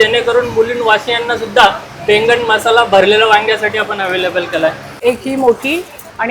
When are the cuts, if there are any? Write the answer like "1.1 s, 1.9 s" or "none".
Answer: 4.9 s